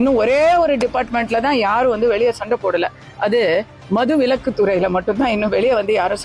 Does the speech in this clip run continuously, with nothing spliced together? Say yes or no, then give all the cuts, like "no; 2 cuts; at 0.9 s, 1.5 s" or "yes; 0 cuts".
yes; 0 cuts